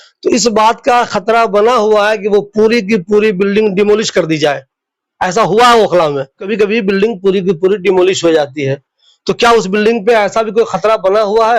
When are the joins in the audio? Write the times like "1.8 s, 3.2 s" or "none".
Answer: 6.5 s